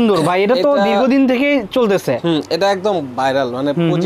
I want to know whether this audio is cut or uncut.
uncut